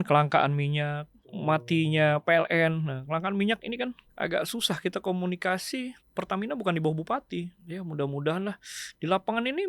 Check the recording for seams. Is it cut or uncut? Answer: cut